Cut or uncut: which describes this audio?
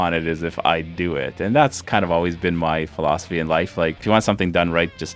uncut